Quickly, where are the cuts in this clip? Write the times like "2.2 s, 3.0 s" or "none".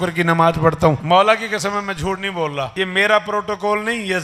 1.0 s, 2.7 s